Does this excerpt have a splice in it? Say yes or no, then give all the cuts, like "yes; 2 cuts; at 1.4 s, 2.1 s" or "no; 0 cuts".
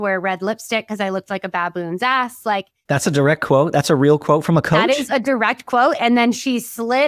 yes; 1 cut; at 2.7 s